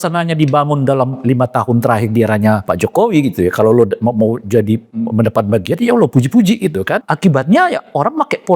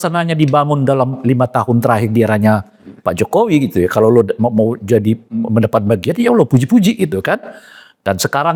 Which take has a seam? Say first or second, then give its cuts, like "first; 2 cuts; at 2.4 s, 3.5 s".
first; 2 cuts; at 2.6 s, 7.1 s